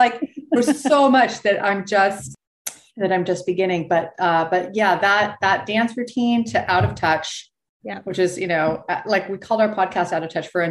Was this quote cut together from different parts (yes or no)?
yes